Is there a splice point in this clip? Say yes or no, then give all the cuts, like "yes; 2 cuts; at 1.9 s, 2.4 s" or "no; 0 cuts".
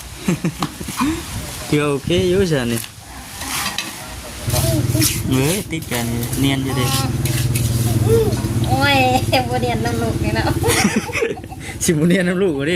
yes; 1 cut; at 4.5 s